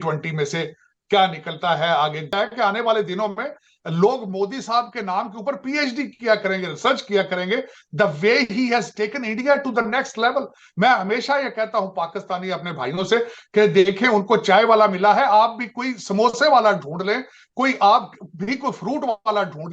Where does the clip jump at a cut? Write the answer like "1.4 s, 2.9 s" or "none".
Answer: 2.3 s